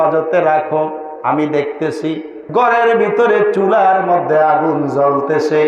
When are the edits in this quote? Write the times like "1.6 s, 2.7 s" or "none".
2.3 s